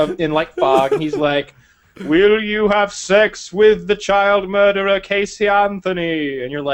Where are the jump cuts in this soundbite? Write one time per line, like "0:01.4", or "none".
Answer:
none